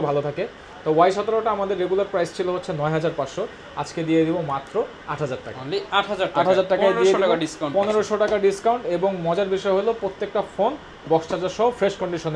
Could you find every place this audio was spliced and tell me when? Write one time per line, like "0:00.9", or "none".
none